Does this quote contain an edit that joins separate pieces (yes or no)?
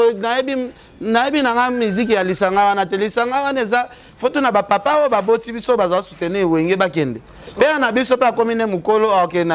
no